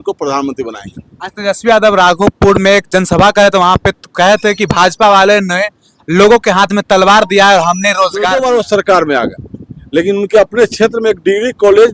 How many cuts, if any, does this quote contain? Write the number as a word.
one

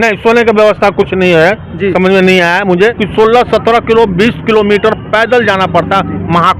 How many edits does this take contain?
one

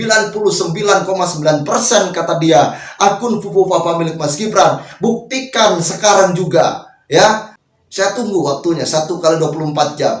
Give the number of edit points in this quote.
one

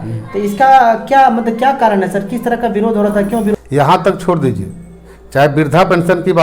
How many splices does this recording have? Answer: one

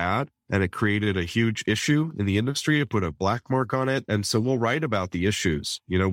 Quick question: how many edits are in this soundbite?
one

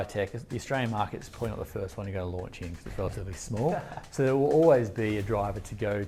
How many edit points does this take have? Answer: zero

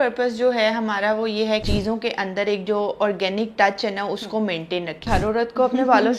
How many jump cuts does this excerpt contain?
two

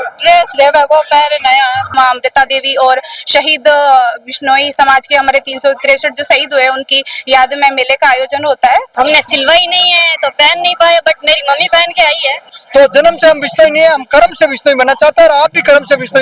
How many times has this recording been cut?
three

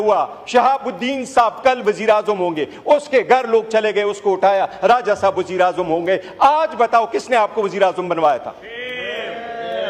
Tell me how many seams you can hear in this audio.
zero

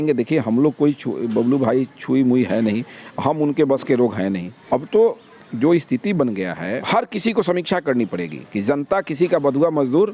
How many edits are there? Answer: two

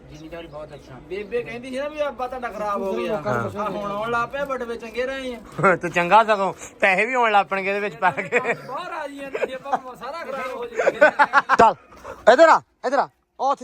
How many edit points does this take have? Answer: one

